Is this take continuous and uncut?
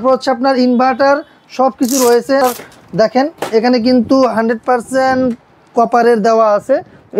no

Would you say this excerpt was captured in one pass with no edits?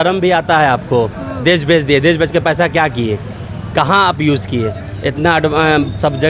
yes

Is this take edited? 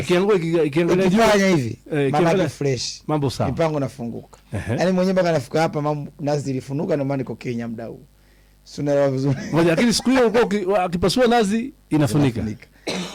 no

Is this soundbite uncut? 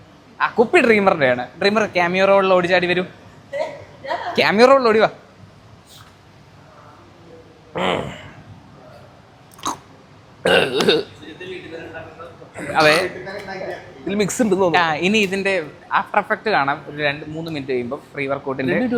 yes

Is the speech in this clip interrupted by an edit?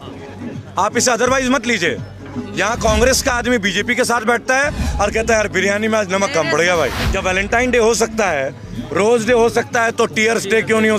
yes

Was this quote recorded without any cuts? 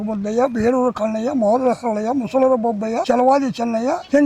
yes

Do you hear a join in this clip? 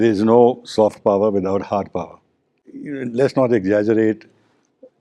no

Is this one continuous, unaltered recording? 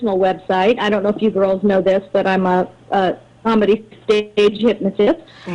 yes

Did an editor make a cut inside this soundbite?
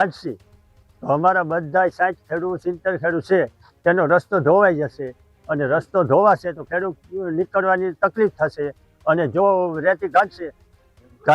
no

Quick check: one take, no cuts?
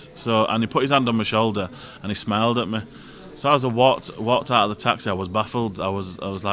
yes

